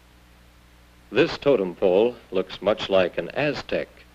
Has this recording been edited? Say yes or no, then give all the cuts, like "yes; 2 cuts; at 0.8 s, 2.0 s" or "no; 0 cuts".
no; 0 cuts